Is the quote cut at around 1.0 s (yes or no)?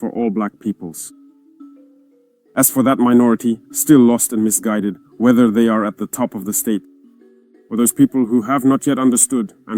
yes